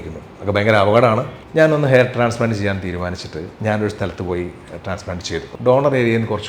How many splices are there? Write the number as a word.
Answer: three